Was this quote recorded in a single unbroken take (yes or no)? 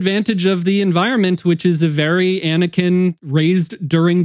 no